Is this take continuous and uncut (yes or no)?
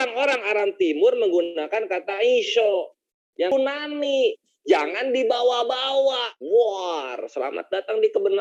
no